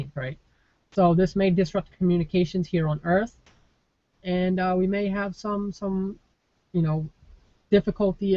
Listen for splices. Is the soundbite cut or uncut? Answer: uncut